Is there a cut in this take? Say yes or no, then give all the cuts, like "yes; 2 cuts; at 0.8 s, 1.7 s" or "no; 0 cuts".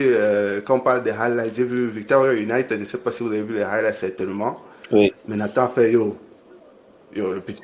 no; 0 cuts